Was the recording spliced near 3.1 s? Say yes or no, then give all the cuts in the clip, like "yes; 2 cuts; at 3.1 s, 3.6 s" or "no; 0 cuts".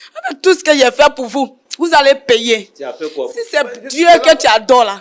no; 0 cuts